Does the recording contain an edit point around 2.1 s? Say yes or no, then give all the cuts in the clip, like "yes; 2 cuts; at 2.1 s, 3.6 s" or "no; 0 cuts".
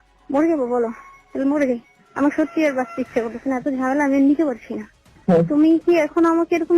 no; 1 cut; at 5.1 s